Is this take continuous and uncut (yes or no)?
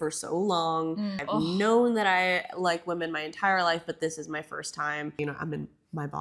no